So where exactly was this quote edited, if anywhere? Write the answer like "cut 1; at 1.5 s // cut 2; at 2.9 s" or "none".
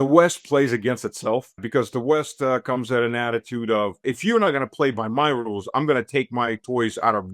cut 1; at 1.6 s // cut 2; at 4.0 s